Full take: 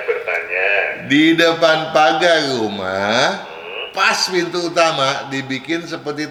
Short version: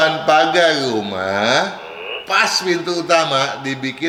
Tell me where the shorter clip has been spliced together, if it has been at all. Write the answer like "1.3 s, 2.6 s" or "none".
none